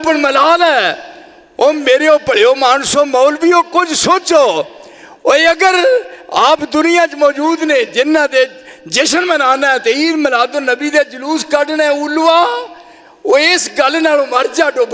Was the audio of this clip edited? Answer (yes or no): no